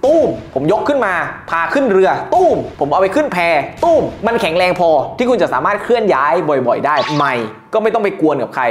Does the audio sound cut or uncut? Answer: cut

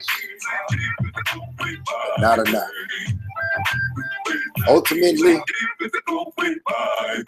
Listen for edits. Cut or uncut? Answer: uncut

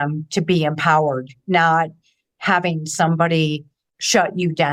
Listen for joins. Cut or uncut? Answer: uncut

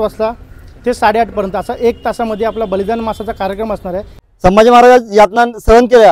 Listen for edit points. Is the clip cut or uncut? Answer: cut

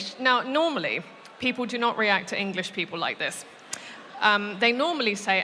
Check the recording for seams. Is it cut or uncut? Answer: uncut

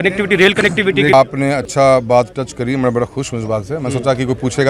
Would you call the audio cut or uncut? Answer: cut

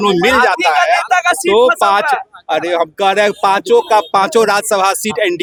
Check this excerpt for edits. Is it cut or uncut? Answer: uncut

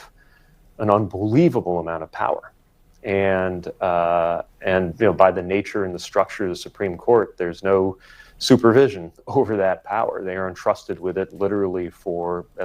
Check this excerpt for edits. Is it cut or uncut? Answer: uncut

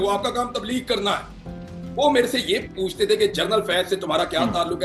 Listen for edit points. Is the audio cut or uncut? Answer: cut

